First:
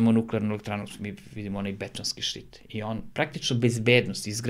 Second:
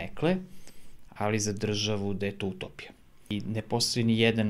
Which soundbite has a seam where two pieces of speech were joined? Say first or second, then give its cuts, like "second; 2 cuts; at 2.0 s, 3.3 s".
second; 1 cut; at 3.3 s